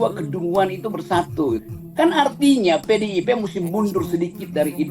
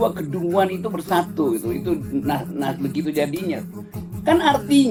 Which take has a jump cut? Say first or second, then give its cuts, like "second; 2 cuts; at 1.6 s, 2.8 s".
first; 1 cut; at 1.6 s